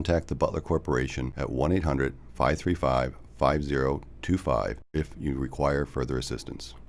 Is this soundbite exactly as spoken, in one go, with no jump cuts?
no; 1 cut; at 4.9 s

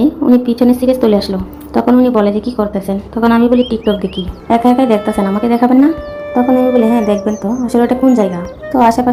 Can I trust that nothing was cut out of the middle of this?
yes; 0 cuts

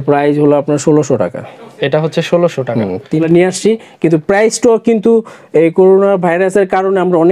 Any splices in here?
yes; 1 cut; at 3.2 s

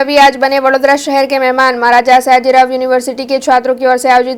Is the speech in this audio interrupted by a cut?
no; 0 cuts

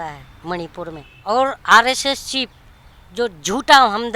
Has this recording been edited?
yes; 1 cut; at 1.1 s

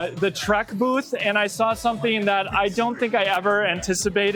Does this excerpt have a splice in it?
no; 0 cuts

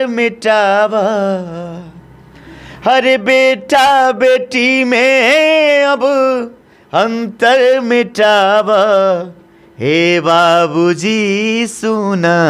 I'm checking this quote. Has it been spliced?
no; 0 cuts

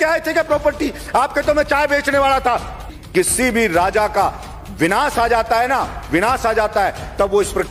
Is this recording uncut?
no; 1 cut; at 2.9 s

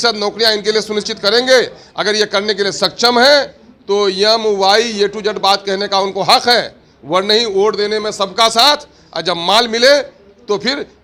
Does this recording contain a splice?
no; 0 cuts

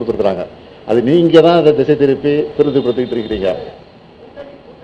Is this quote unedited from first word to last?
yes; 0 cuts

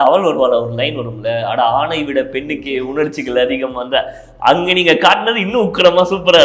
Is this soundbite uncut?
yes; 0 cuts

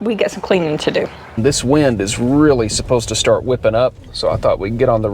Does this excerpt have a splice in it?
yes; 2 cuts; at 1.4 s, 4.1 s

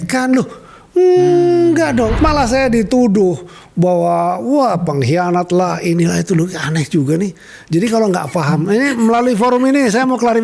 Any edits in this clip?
yes; 1 cut; at 2.1 s

